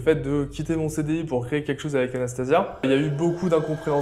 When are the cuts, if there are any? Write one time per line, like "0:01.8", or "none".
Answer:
0:02.8